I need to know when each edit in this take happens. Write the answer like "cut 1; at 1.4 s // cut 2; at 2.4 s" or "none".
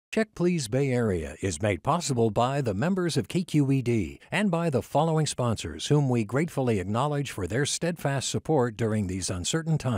none